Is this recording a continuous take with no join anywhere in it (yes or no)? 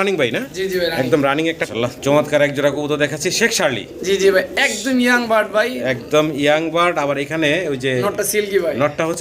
no